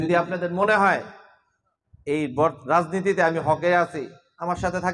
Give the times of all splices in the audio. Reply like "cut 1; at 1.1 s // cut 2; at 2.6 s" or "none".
none

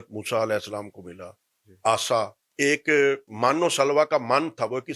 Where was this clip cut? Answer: cut 1; at 2.4 s // cut 2; at 3.3 s

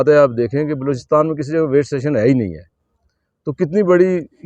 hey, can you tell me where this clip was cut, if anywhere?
none

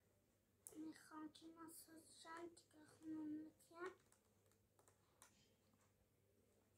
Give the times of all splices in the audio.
none

